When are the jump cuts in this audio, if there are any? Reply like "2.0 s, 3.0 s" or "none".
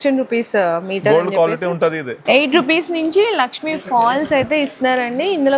2.1 s